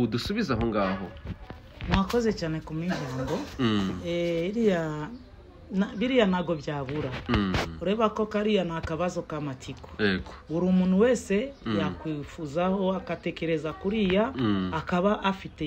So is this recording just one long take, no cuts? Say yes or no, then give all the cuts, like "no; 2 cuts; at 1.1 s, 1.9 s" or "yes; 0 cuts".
yes; 0 cuts